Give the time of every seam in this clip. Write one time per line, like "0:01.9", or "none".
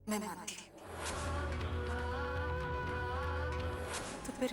none